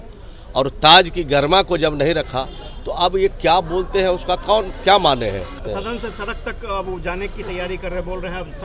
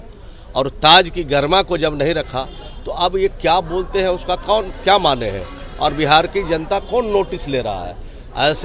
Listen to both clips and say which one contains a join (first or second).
first